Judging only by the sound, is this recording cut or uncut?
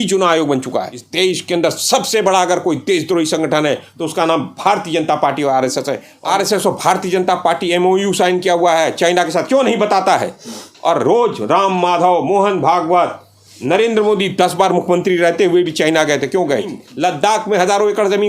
cut